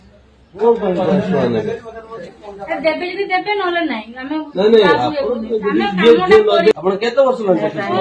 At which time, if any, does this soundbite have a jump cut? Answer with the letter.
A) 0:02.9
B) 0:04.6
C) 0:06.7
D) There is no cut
C